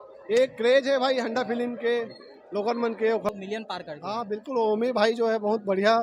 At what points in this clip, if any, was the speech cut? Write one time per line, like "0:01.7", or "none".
0:03.3